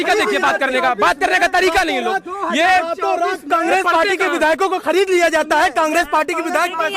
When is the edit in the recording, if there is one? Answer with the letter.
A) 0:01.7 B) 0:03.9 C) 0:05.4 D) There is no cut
D